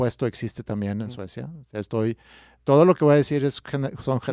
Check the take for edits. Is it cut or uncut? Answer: uncut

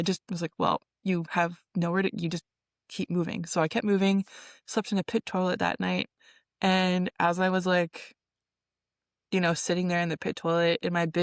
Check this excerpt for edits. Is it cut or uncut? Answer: uncut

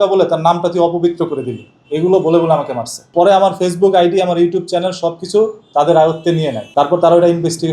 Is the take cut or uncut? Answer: cut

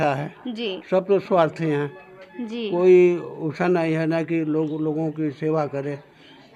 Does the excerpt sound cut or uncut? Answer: uncut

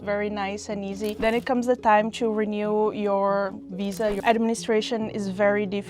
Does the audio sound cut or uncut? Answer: cut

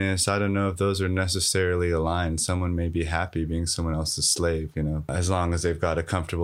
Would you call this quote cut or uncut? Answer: cut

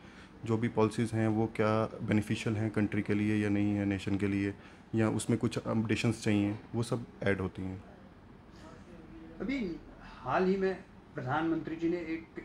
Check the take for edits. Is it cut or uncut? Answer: uncut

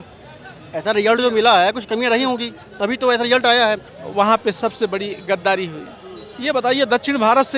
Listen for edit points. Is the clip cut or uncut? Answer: cut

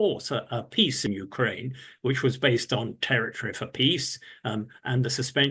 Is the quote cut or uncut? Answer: cut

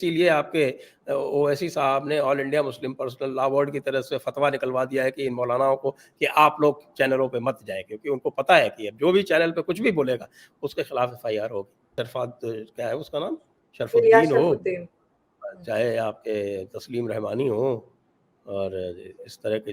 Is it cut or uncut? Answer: cut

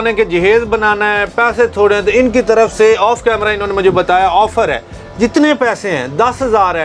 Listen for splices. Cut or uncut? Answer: uncut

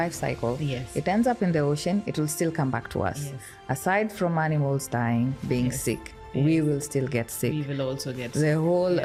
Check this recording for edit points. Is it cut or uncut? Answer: uncut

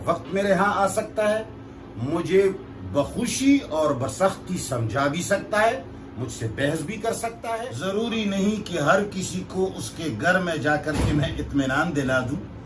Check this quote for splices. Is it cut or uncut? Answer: cut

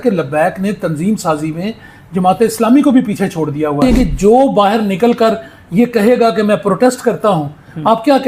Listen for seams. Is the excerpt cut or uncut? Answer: cut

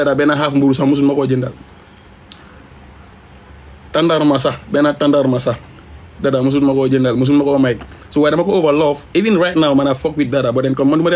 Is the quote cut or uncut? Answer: uncut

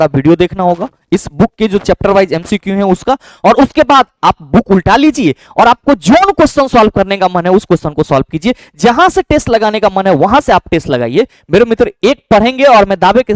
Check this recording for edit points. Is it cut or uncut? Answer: uncut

